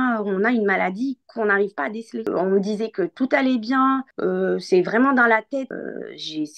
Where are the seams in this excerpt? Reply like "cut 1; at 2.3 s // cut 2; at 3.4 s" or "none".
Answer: cut 1; at 2.3 s // cut 2; at 5.7 s